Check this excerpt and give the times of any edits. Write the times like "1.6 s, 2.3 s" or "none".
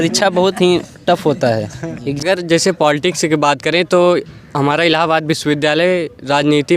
2.1 s